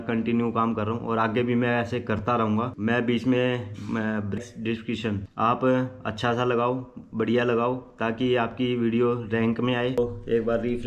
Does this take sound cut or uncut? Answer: cut